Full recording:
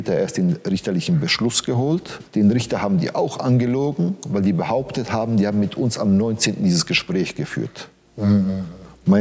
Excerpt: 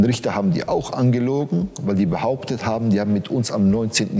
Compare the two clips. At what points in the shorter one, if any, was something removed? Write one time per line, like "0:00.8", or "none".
none